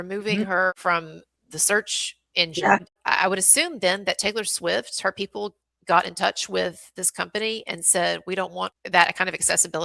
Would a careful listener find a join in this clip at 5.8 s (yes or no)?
no